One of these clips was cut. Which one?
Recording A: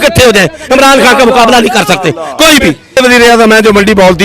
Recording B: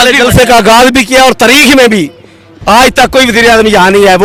A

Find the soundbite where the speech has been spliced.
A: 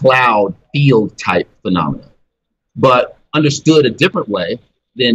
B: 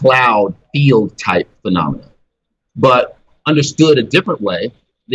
A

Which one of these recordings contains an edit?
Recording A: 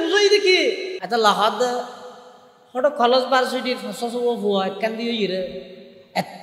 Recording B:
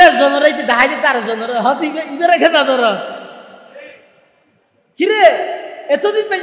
A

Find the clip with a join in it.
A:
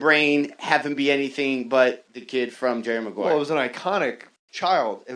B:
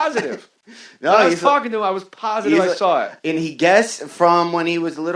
B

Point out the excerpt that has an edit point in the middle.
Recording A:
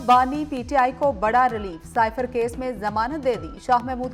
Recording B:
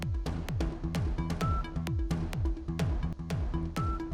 B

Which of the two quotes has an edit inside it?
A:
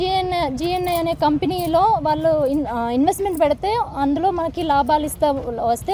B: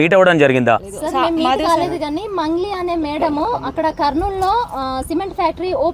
B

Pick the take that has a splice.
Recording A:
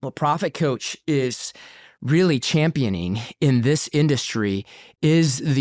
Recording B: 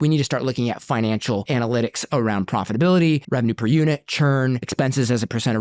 B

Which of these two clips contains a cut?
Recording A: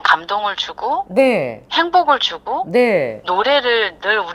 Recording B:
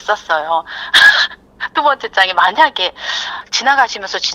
B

